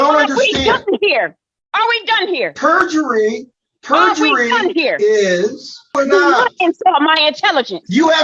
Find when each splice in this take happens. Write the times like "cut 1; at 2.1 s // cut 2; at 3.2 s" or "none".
cut 1; at 5.9 s